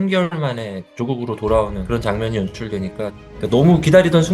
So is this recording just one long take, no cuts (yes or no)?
no